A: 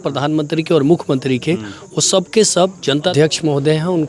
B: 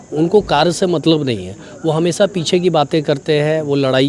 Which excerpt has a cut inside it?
A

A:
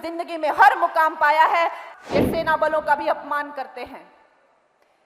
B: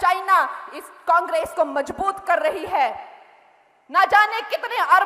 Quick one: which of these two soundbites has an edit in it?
A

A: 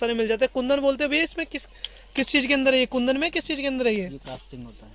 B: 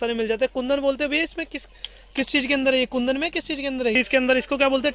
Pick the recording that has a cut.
B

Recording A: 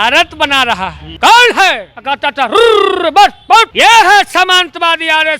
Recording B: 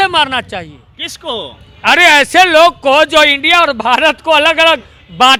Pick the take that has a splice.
A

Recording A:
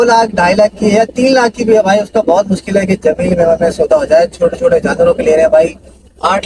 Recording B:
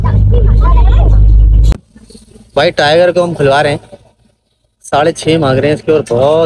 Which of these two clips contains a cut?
B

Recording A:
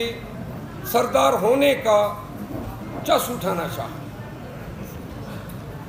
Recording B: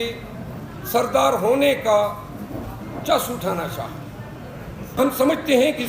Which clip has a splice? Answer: B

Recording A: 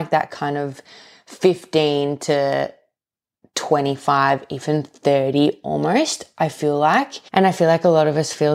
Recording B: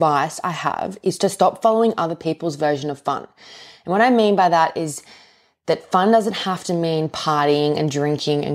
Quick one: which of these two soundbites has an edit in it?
A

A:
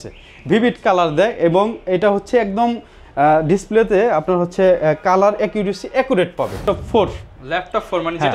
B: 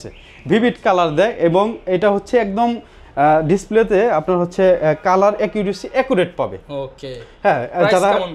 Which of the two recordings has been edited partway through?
A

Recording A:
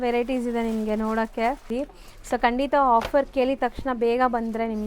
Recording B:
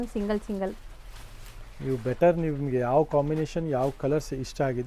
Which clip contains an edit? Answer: A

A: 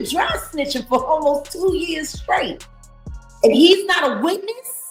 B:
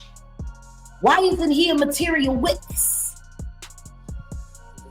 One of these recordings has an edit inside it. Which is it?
B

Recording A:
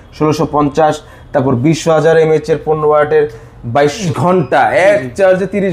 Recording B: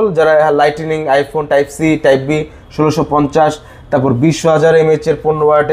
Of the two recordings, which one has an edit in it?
A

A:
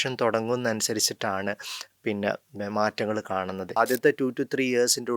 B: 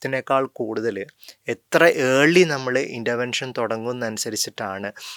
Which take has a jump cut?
A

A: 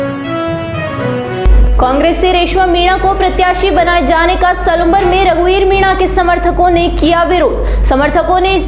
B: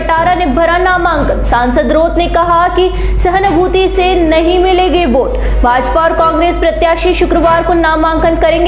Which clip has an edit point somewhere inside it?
A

